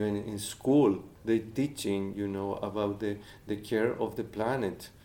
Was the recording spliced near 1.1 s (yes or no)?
yes